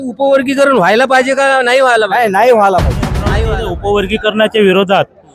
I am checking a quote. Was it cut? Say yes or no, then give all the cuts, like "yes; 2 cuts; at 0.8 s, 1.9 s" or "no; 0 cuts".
yes; 1 cut; at 3.4 s